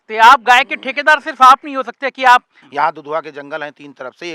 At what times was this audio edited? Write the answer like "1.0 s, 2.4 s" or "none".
2.6 s